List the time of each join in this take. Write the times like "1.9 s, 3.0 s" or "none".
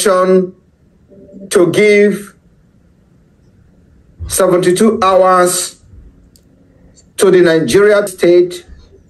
8.1 s